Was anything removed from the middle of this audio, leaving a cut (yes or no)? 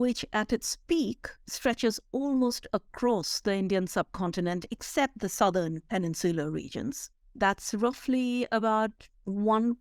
no